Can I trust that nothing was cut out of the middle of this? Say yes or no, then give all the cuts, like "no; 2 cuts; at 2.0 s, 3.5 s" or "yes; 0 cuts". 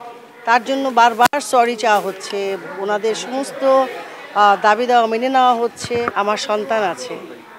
no; 1 cut; at 6.1 s